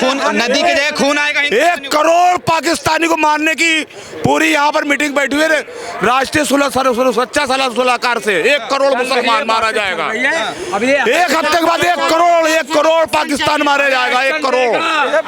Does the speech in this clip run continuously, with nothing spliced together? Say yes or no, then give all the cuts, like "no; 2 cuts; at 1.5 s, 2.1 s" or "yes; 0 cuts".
yes; 0 cuts